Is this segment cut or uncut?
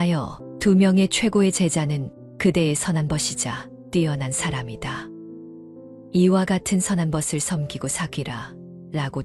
uncut